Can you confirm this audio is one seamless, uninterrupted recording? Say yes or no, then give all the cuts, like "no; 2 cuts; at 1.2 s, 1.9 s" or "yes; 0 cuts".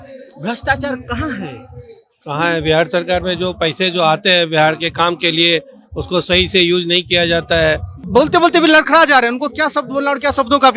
no; 1 cut; at 7.9 s